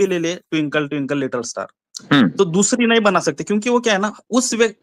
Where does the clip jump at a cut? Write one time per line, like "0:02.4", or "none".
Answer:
none